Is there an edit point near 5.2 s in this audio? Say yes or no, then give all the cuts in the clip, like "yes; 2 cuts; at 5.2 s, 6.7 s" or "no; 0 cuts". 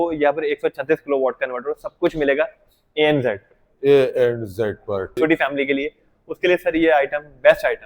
yes; 1 cut; at 5.2 s